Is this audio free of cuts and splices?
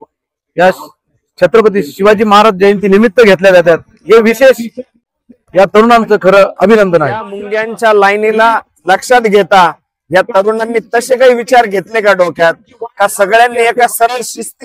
no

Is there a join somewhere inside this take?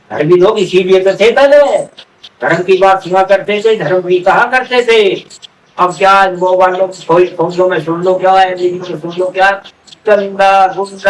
no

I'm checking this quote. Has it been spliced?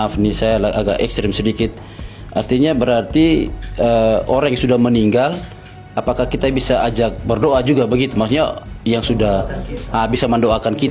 no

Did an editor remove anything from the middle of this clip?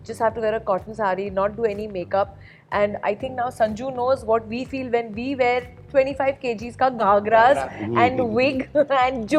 no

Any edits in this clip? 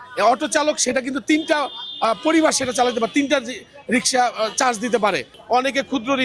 yes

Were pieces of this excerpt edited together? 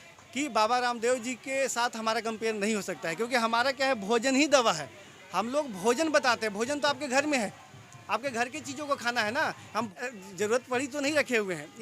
yes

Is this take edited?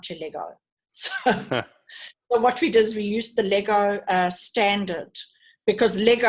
no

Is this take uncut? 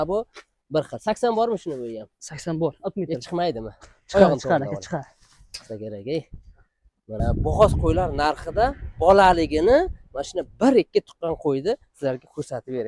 no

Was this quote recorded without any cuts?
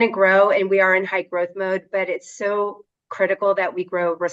yes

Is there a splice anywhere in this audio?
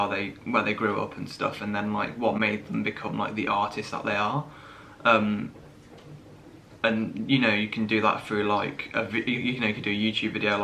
no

